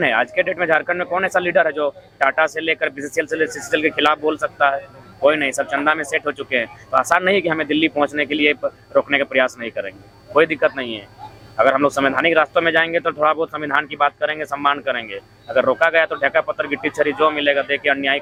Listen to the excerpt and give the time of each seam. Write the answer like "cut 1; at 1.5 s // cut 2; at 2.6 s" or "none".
none